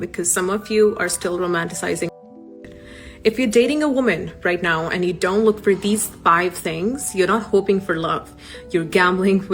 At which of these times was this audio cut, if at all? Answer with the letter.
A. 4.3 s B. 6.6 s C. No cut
C